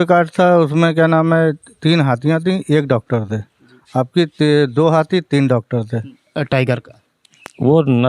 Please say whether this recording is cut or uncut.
cut